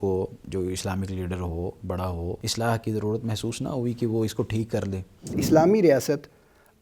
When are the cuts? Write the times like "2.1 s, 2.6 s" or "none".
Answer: 2.4 s, 5.4 s